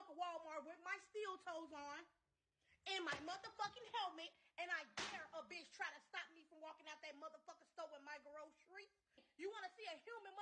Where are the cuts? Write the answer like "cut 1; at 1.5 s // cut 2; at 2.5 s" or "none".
cut 1; at 9.2 s